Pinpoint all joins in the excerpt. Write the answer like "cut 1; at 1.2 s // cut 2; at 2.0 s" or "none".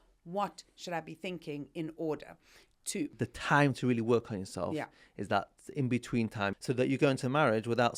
cut 1; at 3.1 s // cut 2; at 6.5 s